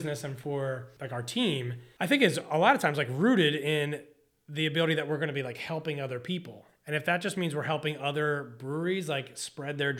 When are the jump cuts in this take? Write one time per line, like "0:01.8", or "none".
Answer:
0:00.9
0:01.8

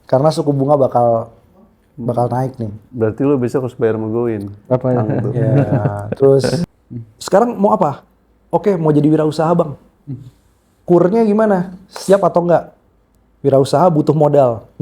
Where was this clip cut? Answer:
0:06.6

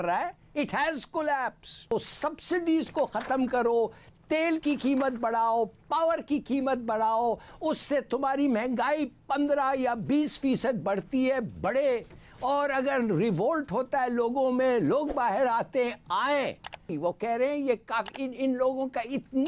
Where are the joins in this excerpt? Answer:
0:01.9
0:16.9

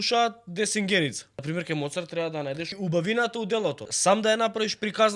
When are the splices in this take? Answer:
0:01.3
0:02.7
0:03.9

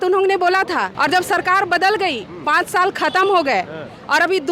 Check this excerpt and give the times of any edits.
0:00.9

